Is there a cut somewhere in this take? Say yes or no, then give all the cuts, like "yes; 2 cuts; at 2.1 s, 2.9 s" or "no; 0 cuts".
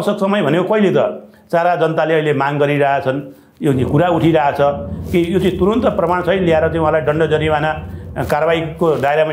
no; 0 cuts